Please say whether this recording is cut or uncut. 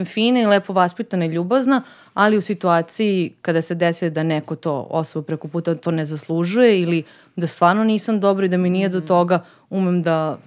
uncut